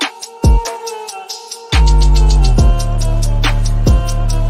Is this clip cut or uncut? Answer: uncut